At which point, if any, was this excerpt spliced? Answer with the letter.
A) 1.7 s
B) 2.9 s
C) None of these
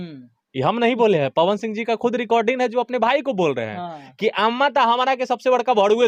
C